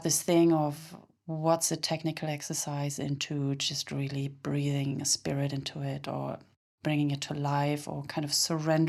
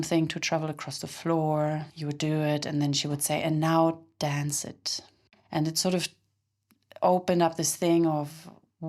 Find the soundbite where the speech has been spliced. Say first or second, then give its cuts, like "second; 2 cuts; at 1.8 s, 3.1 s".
second; 2 cuts; at 1.9 s, 5.4 s